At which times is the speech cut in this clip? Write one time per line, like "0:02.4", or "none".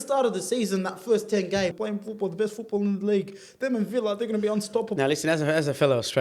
0:01.8
0:04.9